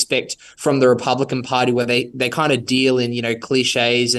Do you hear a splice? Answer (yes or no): no